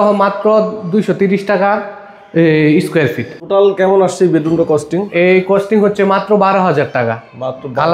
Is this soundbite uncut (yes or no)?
no